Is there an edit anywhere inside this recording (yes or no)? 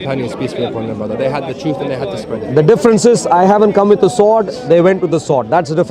no